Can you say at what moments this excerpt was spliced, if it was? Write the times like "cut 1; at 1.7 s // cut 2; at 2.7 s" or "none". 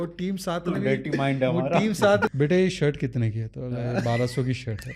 cut 1; at 2.3 s